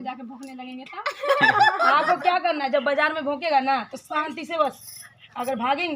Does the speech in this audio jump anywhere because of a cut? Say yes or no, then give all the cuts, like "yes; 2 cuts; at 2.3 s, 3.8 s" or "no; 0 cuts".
no; 0 cuts